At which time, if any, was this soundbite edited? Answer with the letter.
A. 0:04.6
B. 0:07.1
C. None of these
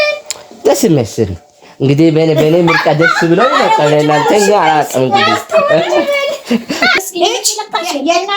B